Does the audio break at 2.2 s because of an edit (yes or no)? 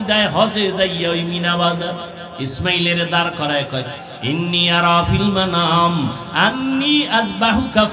yes